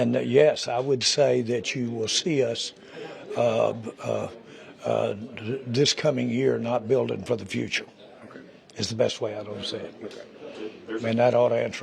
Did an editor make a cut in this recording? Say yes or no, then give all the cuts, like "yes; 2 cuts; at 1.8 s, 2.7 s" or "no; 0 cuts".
no; 0 cuts